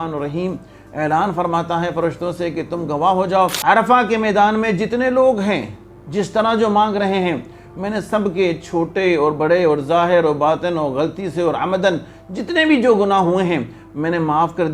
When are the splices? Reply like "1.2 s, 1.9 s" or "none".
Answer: 3.6 s